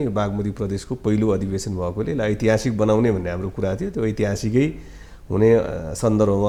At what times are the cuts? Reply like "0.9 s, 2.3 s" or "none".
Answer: none

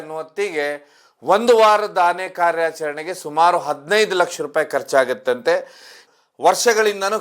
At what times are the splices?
6.0 s

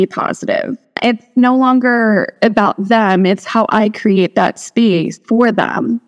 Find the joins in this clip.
1.0 s, 2.3 s, 5.2 s

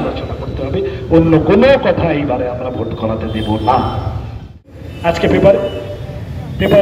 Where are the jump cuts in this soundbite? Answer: 4.9 s

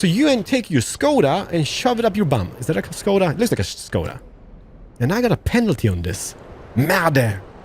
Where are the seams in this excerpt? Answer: none

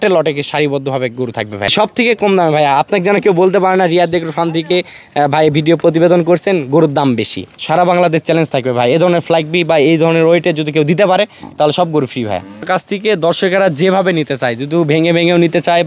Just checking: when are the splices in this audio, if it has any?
1.7 s, 7.6 s, 12.6 s

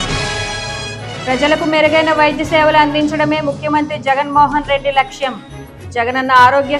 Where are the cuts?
1.2 s

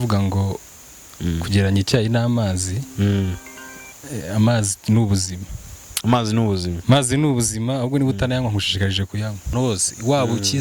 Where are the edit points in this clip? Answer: 9.5 s

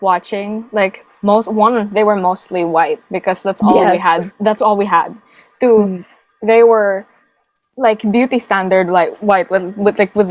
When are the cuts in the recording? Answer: none

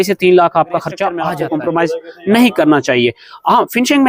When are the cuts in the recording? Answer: 1.2 s

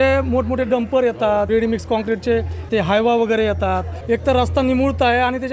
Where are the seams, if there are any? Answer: 1.5 s, 2.7 s, 3.9 s

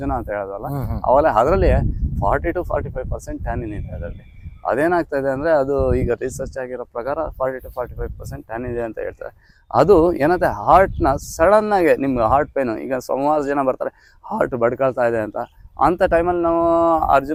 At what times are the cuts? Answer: none

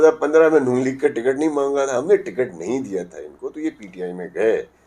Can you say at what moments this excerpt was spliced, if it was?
none

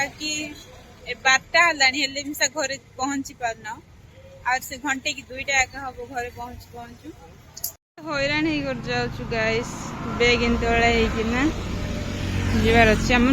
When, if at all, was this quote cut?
7.8 s

